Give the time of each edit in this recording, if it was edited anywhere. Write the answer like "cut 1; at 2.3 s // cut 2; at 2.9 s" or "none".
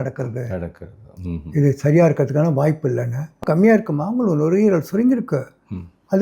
cut 1; at 3.4 s